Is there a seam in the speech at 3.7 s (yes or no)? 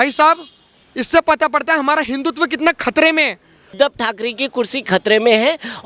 yes